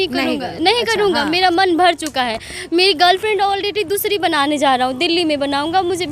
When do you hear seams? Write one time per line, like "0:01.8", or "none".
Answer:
none